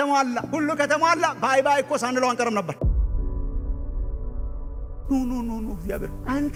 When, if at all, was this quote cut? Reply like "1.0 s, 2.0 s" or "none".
none